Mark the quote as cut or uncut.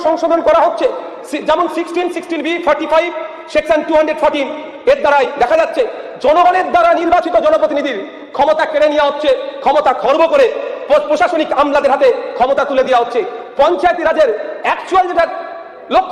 uncut